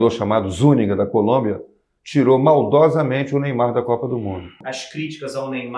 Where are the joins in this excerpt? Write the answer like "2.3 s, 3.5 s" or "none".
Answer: 4.6 s